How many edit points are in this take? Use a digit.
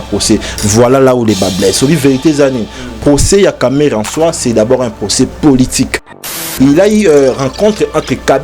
1